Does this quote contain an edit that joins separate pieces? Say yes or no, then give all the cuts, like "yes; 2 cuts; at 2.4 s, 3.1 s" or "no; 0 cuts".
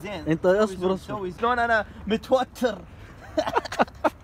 yes; 1 cut; at 1.2 s